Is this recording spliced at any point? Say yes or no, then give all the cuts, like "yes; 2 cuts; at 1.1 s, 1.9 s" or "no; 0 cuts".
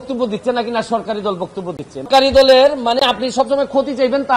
no; 0 cuts